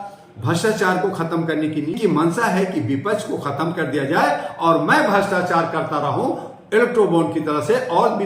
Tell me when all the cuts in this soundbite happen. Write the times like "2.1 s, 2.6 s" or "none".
2.0 s